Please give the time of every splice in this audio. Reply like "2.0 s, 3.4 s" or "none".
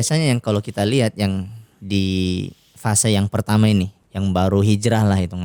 4.0 s